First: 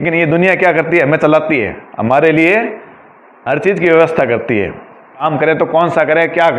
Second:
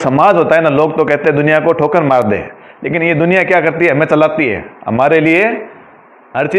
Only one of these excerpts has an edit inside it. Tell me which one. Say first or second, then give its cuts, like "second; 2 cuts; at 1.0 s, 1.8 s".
first; 1 cut; at 5.2 s